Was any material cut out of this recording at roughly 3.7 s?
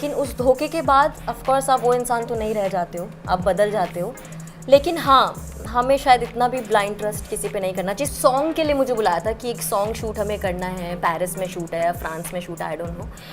no; 1 cut; at 8.0 s

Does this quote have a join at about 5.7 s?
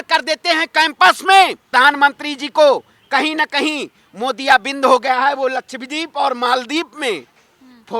no; 1 cut; at 1.6 s

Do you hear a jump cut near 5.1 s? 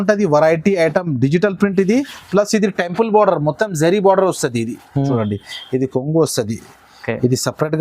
yes; 1 cut; at 5.1 s

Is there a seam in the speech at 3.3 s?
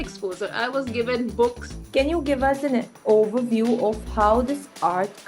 no; 1 cut; at 1.9 s

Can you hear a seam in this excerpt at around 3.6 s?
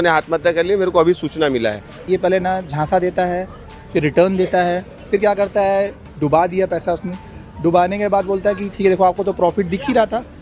no; 1 cut; at 2.0 s

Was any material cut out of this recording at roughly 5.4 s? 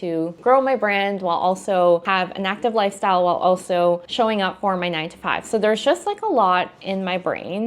no; 0 cuts

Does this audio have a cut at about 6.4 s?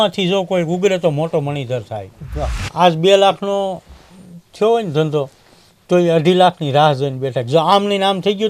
no; 1 cut; at 2.6 s

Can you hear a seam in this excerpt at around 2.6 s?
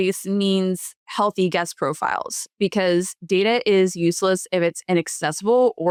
no; 0 cuts

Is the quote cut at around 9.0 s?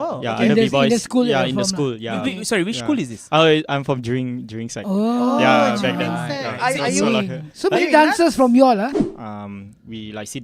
yes; 1 cut; at 9.0 s

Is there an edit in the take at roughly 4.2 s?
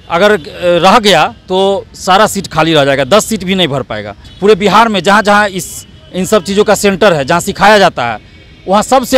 yes; 1 cut; at 4.2 s

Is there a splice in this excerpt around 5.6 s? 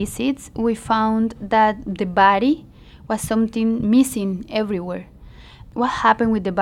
yes; 1 cut; at 5.6 s

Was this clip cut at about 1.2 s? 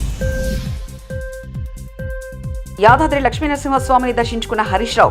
no; 1 cut; at 2.5 s

